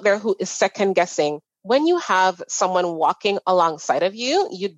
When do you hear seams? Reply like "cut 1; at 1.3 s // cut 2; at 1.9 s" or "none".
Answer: cut 1; at 1.5 s

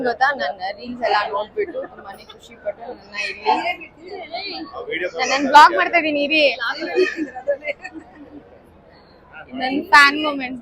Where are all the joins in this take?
none

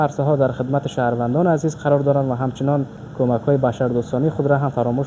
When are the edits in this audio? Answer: none

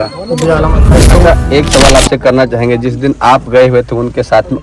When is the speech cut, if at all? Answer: cut 1; at 1.1 s

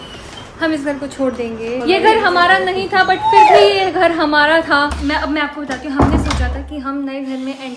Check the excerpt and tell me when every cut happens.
cut 1; at 1.8 s // cut 2; at 5.0 s

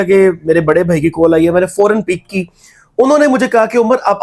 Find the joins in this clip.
none

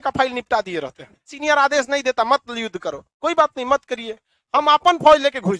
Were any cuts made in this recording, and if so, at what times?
cut 1; at 1.4 s

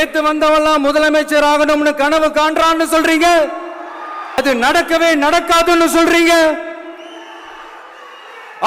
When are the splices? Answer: cut 1; at 4.4 s

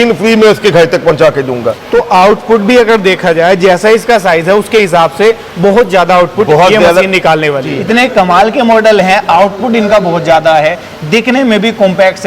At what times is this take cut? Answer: cut 1; at 1.7 s // cut 2; at 7.7 s

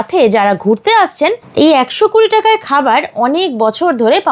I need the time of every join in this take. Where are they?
cut 1; at 1.4 s

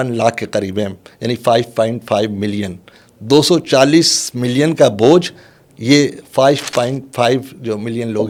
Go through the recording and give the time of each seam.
none

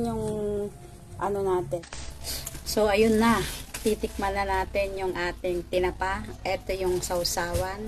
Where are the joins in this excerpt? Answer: cut 1; at 1.8 s

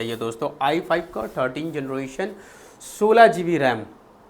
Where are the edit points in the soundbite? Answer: none

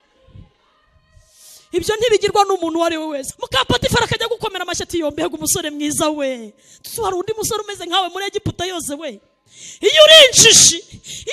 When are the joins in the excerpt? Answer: cut 1; at 3.3 s

